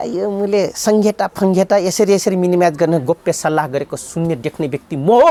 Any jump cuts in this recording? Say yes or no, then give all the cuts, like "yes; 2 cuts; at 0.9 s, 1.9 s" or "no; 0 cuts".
no; 0 cuts